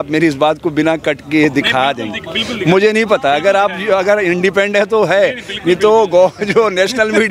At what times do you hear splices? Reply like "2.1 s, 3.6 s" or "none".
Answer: none

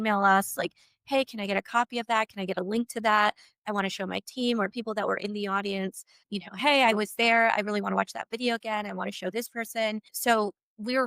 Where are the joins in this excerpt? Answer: 6.2 s, 10.1 s

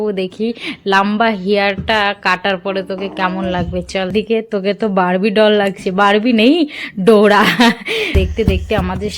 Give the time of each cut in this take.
4.1 s, 8.2 s

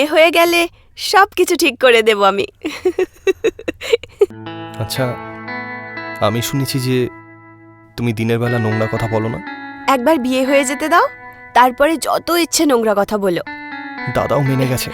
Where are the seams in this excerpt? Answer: 4.3 s

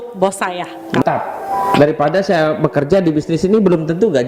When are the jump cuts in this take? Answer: 1.0 s

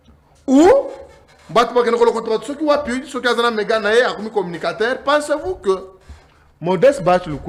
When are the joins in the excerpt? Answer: none

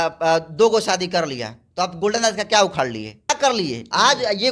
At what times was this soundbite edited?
3.3 s

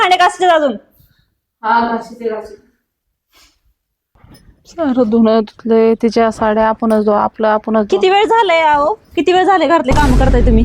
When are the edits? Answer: 4.2 s

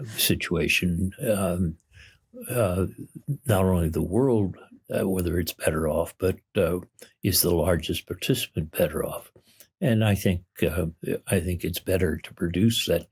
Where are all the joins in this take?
none

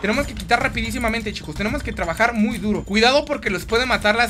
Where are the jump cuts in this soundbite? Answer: 2.8 s

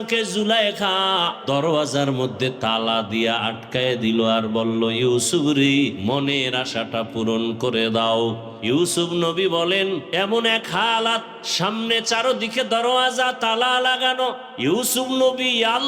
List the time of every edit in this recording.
1.4 s, 6.0 s, 8.5 s, 10.1 s, 11.4 s, 14.5 s

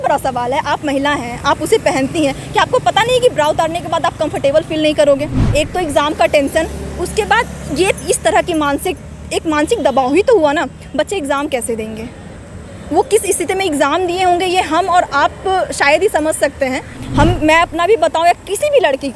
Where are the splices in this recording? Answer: 5.4 s, 16.9 s

